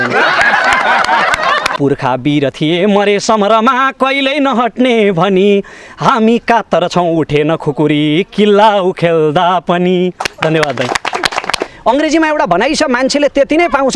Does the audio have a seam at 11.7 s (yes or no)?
yes